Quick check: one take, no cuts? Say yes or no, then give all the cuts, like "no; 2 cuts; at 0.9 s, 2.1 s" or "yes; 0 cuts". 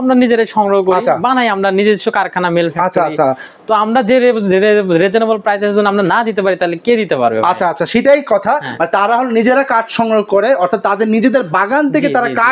yes; 0 cuts